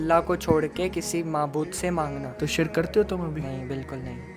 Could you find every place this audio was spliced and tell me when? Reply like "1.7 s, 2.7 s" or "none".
2.3 s